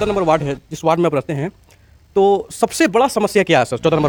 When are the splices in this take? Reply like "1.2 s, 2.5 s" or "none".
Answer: none